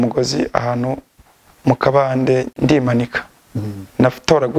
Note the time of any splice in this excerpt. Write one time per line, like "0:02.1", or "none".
0:02.5

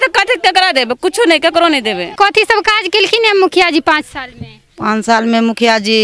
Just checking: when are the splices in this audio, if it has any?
0:02.1

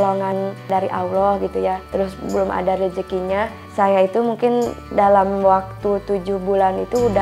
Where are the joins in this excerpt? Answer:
none

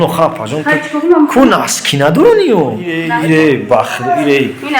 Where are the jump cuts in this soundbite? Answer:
0:03.1

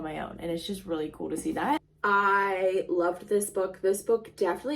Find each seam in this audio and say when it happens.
0:01.9

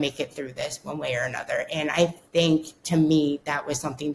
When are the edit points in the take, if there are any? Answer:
none

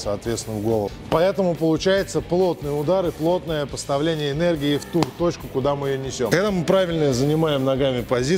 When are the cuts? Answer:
0:01.0
0:06.3

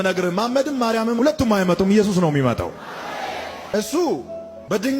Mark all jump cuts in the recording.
0:03.7

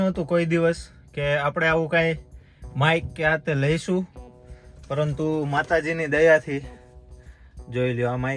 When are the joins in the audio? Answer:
none

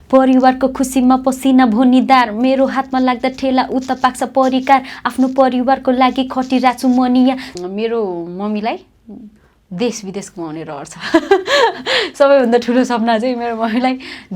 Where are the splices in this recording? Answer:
0:07.5

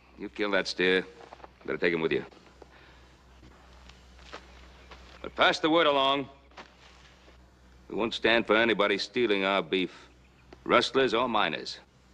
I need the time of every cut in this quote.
0:01.4

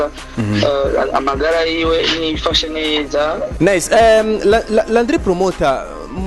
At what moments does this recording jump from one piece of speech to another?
0:03.5

